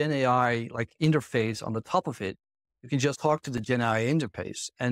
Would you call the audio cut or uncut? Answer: cut